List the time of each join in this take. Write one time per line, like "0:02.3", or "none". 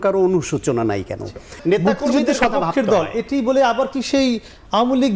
0:01.6